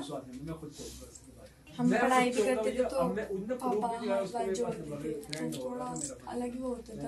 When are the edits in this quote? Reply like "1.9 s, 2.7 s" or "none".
1.7 s